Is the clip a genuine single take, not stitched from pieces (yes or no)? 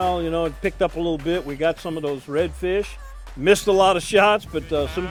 yes